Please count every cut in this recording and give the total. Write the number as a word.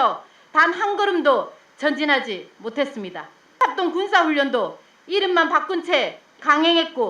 one